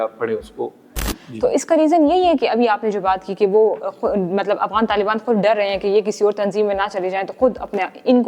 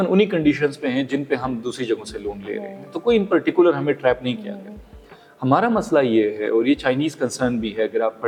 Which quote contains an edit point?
first; 1 cut; at 1.2 s

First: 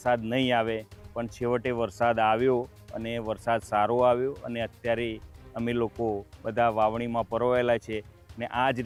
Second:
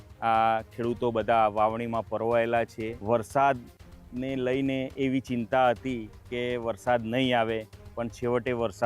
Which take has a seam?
second; 1 cut; at 2.9 s

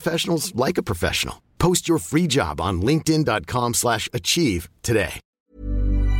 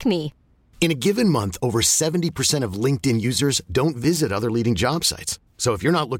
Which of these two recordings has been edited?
first; 1 cut; at 5.2 s

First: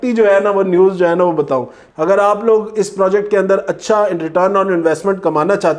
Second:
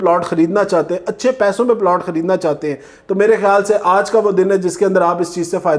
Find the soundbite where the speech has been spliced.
first; 1 cut; at 1.8 s

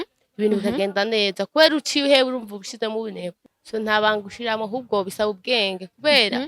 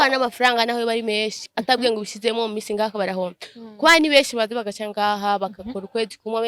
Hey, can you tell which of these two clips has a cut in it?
first; 1 cut; at 3.5 s

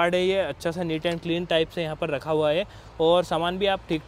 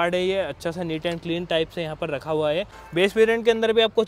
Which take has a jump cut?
second; 1 cut; at 2.8 s

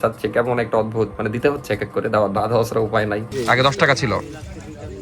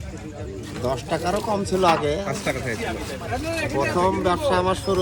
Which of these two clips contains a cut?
first; 1 cut; at 3.3 s

